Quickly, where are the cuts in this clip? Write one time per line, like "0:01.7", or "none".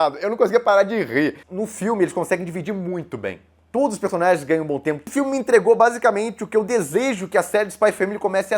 0:01.5
0:05.1

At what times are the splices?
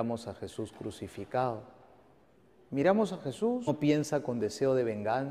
none

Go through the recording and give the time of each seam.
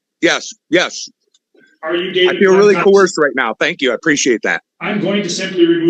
0:04.7

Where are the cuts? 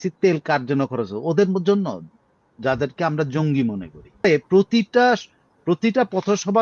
0:04.2

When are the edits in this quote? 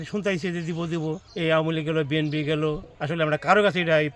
0:01.3
0:02.9

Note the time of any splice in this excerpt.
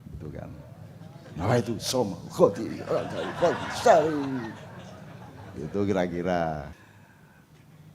0:06.8

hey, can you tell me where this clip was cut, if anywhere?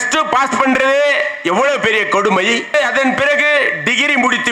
0:02.7

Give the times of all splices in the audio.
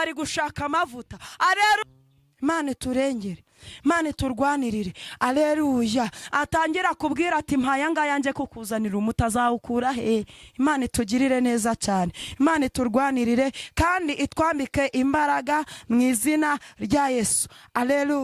0:01.8

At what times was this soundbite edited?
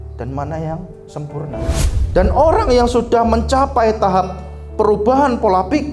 0:01.8

